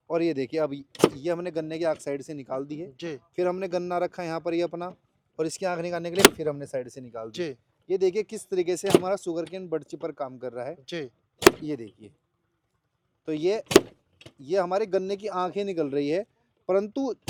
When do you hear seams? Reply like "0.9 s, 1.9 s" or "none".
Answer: none